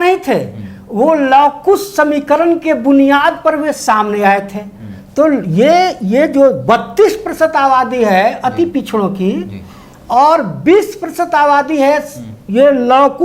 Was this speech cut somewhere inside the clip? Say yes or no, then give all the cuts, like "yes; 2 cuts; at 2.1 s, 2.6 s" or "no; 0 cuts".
no; 0 cuts